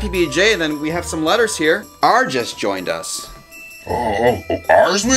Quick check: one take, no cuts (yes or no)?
no